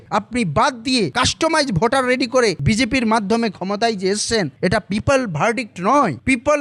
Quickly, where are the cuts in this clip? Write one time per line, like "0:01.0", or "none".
0:01.1
0:02.6